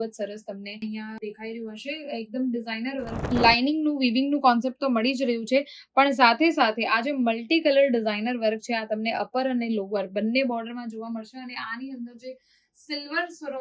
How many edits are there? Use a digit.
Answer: 1